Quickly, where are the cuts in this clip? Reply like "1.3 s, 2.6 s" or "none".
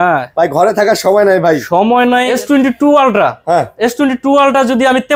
2.3 s